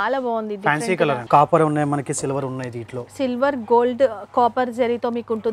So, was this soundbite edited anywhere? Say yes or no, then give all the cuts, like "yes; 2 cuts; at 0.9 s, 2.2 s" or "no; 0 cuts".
yes; 1 cut; at 1.2 s